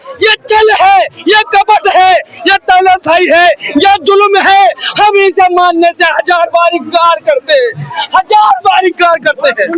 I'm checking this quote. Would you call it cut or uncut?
uncut